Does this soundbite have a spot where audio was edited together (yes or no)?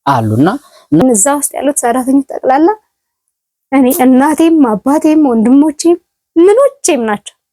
yes